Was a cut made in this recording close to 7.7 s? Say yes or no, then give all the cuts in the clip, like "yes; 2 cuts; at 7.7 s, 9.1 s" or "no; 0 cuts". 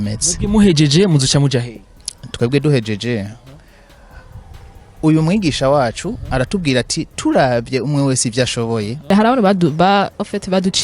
no; 1 cut; at 9.1 s